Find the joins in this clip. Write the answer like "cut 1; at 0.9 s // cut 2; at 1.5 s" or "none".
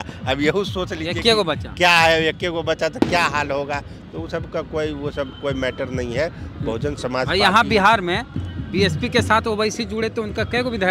none